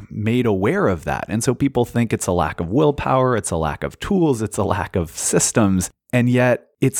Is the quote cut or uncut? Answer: uncut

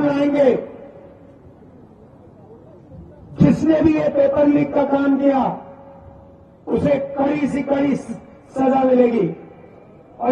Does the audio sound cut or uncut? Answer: uncut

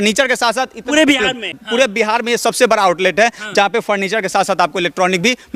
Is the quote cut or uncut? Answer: cut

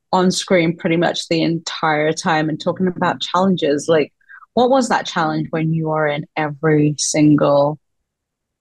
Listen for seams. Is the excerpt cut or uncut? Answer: uncut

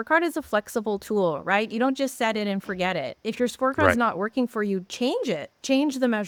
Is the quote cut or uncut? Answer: uncut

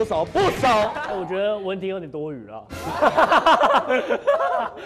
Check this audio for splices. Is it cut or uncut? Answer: cut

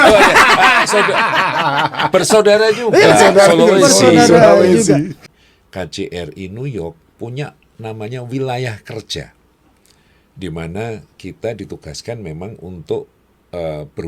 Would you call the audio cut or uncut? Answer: cut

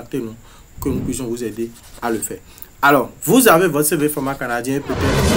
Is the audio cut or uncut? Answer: uncut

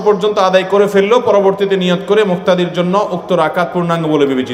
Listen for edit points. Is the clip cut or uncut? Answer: uncut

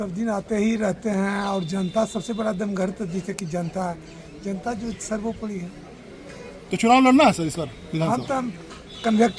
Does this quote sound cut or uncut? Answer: uncut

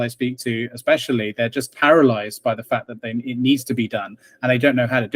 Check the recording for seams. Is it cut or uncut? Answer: uncut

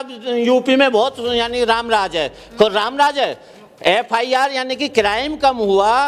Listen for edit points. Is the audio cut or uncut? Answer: uncut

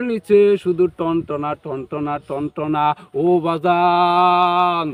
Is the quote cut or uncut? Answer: uncut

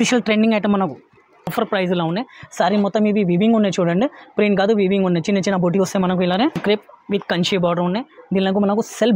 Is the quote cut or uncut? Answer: cut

